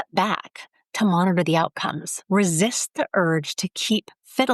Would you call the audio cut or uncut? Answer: cut